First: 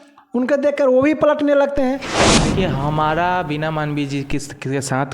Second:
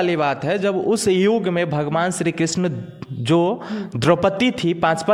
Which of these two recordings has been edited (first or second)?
first